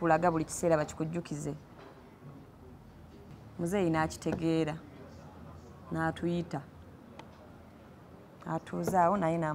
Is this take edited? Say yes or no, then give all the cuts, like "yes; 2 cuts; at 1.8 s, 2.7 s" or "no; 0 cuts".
yes; 1 cut; at 3.3 s